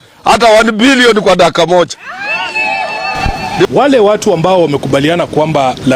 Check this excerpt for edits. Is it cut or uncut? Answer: cut